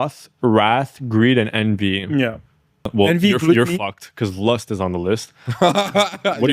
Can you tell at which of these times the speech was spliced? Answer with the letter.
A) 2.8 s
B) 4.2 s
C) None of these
A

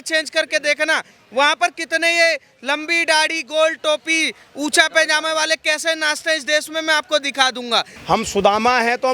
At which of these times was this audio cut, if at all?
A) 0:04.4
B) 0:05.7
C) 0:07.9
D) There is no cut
C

